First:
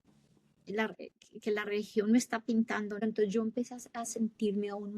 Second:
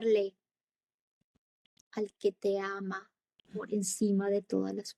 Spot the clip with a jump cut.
first; 1 cut; at 3.0 s

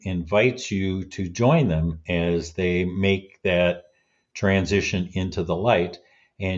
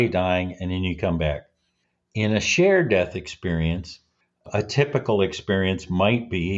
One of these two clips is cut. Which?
second; 1 cut; at 4.5 s

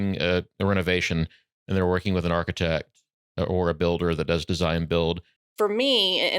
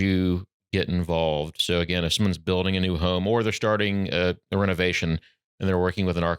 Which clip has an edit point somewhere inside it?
first; 1 cut; at 5.4 s

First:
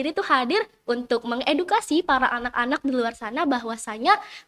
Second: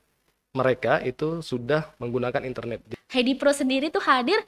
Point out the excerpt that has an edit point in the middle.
second; 1 cut; at 2.9 s

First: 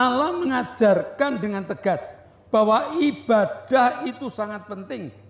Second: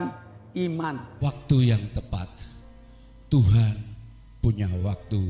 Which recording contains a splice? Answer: second; 1 cut; at 1.1 s

